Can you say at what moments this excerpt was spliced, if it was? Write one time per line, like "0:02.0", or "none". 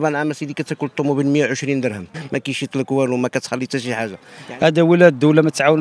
0:02.1
0:04.3